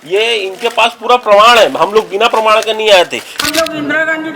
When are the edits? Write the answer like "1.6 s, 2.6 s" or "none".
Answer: 3.4 s